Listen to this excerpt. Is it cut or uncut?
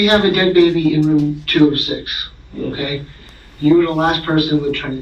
uncut